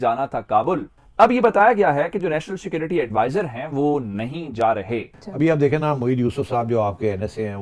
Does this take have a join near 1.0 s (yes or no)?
yes